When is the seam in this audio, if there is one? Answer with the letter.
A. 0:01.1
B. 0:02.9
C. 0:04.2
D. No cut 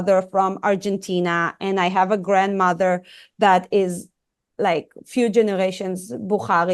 D